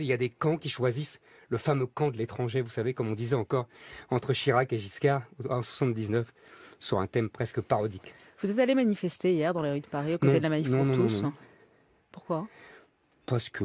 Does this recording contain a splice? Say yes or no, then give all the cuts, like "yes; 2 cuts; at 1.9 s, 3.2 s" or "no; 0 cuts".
yes; 1 cut; at 11.6 s